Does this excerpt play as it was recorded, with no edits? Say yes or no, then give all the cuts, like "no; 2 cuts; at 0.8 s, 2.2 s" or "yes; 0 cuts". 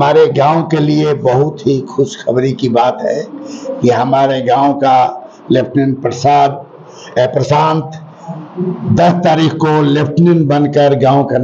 yes; 0 cuts